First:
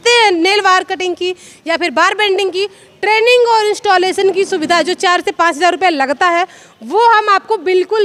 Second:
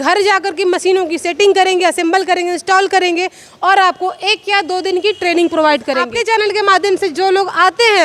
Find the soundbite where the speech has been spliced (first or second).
second